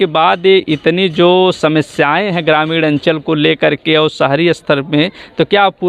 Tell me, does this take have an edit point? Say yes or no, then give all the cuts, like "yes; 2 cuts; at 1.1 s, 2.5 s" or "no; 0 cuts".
no; 0 cuts